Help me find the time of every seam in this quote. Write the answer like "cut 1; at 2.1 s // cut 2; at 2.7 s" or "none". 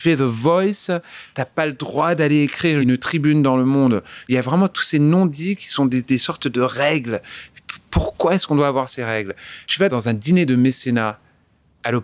cut 1; at 2.9 s // cut 2; at 4.3 s // cut 3; at 9.8 s